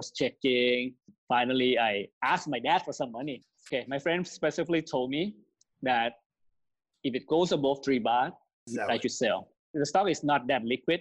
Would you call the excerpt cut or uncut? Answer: cut